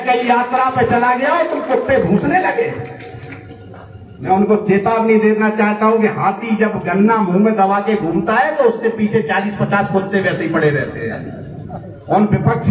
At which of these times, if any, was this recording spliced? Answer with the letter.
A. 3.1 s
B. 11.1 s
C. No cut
C